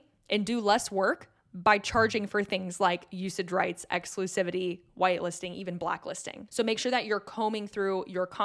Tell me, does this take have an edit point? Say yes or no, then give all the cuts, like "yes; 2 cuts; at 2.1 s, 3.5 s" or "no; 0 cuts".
yes; 1 cut; at 6.4 s